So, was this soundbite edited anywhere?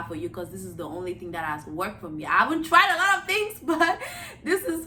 no; 0 cuts

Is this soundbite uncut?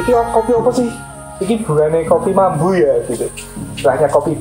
yes; 0 cuts

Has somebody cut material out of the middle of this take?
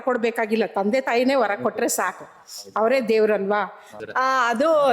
yes; 1 cut; at 4.0 s

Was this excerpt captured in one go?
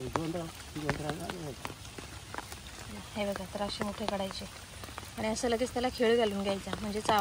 yes; 0 cuts

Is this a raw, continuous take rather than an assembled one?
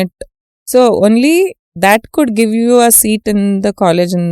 yes; 0 cuts

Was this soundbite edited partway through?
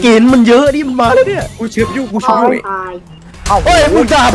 no; 0 cuts

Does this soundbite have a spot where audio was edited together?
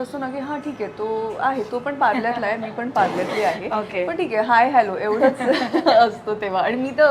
no; 0 cuts

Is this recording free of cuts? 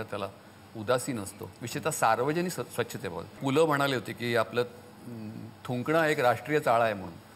no; 1 cut; at 3.4 s

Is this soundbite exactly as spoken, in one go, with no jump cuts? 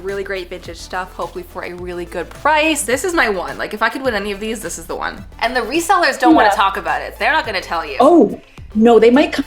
no; 2 cuts; at 2.8 s, 5.3 s

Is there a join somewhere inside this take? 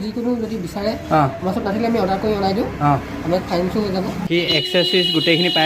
yes; 1 cut; at 4.3 s

